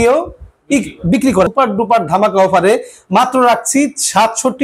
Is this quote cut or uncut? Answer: cut